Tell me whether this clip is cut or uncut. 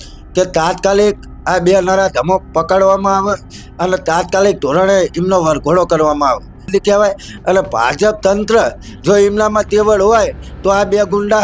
cut